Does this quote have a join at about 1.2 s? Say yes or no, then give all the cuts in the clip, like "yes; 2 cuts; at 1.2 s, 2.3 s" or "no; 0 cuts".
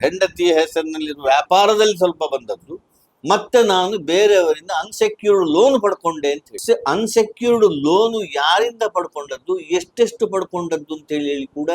no; 1 cut; at 6.6 s